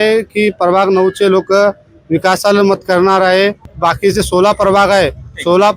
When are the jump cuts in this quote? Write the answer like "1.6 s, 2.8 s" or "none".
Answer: 3.7 s